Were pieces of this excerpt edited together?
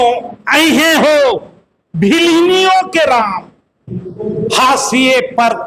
no; 0 cuts

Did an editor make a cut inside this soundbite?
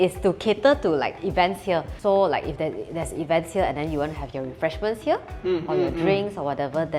no; 0 cuts

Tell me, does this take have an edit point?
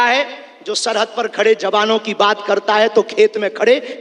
no; 0 cuts

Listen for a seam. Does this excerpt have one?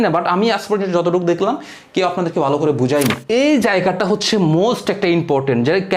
yes; 1 cut; at 3.2 s

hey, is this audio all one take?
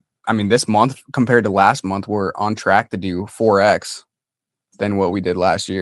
yes; 0 cuts

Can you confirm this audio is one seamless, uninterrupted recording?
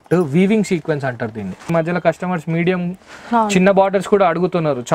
no; 1 cut; at 1.7 s

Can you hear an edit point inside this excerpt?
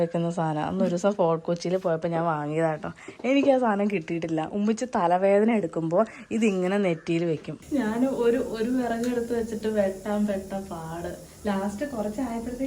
yes; 1 cut; at 7.5 s

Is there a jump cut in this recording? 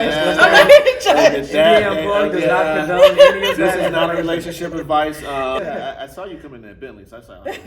yes; 1 cut; at 5.6 s

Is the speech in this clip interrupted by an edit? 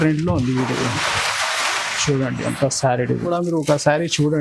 yes; 1 cut; at 3.3 s

